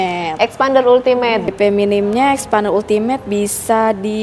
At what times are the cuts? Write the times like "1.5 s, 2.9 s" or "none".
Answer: 1.5 s